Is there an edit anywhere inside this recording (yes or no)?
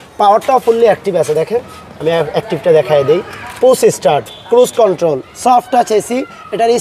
no